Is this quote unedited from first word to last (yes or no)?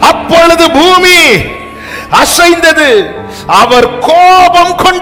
yes